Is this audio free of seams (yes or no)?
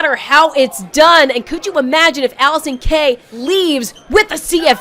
no